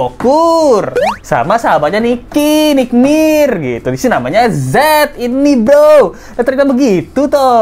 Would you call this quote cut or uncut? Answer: uncut